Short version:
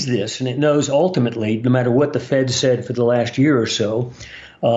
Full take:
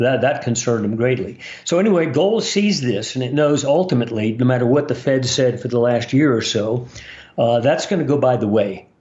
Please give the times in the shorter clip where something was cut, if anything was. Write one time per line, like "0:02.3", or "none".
none